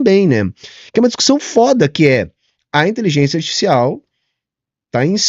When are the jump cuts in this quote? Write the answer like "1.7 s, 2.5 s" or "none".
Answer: none